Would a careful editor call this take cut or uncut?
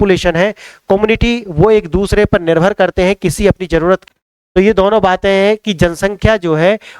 cut